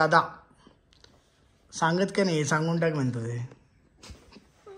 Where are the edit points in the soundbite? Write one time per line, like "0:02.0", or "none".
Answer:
none